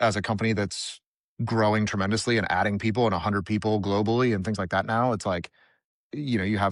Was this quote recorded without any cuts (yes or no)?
yes